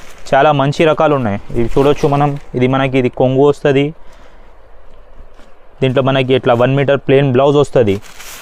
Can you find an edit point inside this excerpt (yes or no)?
no